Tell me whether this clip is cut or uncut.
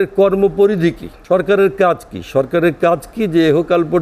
cut